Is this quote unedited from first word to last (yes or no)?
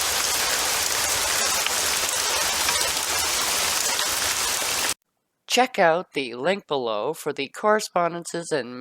no